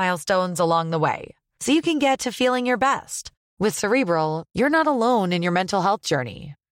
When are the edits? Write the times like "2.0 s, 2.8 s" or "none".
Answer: none